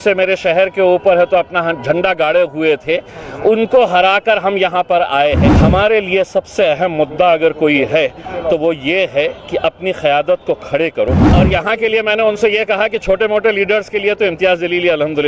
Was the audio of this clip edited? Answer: yes; 2 cuts; at 5.5 s, 11.3 s

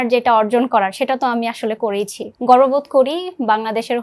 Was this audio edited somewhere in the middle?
yes; 1 cut; at 2.2 s

